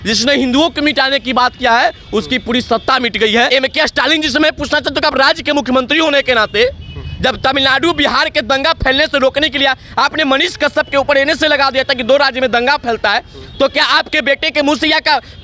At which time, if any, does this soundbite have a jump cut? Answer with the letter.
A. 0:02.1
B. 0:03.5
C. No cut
B